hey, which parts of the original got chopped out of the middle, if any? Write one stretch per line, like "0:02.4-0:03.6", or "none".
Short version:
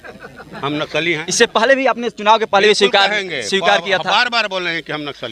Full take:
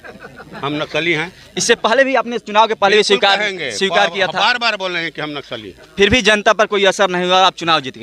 0:01.3-0:01.5